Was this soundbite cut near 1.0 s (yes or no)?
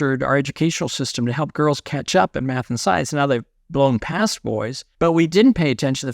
no